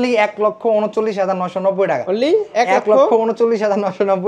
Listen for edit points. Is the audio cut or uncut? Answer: uncut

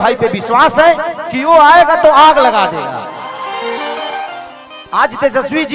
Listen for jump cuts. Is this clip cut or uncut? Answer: cut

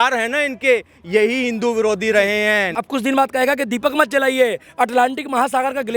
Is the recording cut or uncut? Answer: cut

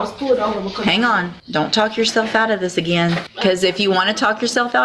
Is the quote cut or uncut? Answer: cut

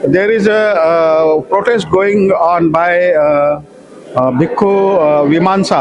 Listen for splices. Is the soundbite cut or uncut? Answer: uncut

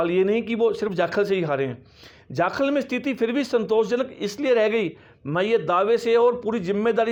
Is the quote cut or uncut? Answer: uncut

